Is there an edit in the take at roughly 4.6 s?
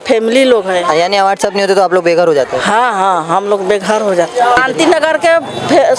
yes; 1 cut; at 4.6 s

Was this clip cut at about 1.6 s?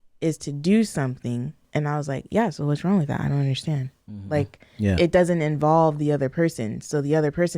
yes; 1 cut; at 1.6 s

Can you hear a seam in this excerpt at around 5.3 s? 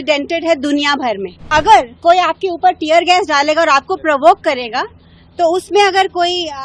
no; 1 cut; at 1.5 s

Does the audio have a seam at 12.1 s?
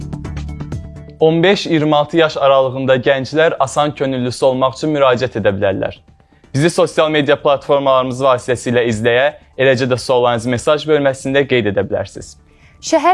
no; 1 cut; at 1.1 s

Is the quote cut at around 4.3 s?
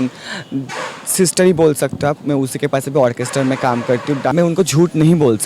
yes; 1 cut; at 4.3 s

